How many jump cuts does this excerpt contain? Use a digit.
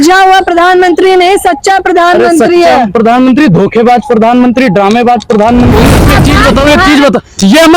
1